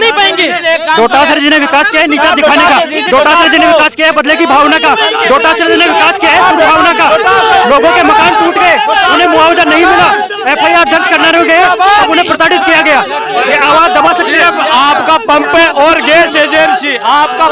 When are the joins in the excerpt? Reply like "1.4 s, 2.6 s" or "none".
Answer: none